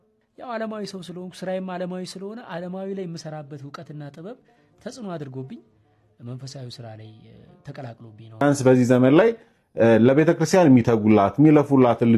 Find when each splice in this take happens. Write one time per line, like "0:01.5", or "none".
0:08.4